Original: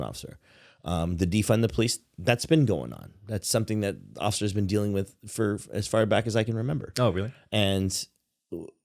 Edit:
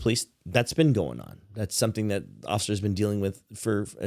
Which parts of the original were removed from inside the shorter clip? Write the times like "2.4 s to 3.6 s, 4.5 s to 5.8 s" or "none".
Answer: none